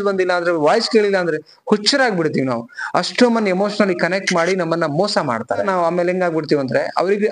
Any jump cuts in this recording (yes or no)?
yes